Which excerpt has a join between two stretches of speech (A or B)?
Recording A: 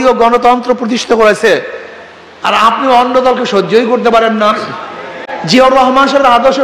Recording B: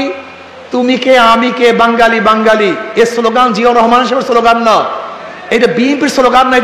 A